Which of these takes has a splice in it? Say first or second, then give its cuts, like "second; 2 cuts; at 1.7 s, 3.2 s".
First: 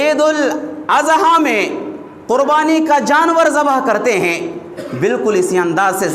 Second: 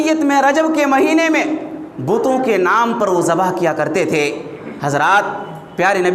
first; 1 cut; at 4.7 s